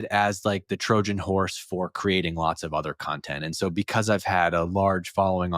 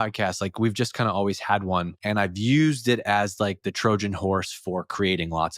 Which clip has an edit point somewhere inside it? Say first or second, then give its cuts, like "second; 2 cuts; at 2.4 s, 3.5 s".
second; 1 cut; at 1.9 s